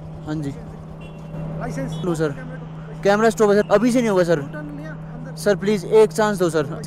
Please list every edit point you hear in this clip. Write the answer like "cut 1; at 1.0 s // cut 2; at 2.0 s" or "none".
none